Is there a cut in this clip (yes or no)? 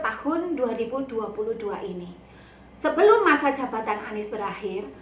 yes